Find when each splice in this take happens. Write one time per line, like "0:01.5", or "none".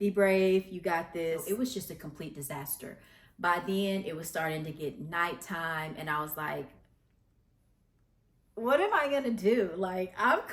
0:01.4